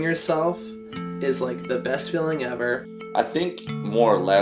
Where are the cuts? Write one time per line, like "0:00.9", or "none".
0:02.9